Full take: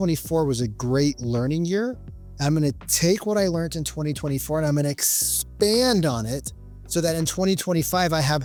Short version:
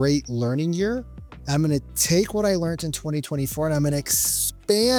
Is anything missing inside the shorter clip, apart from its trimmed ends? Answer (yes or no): no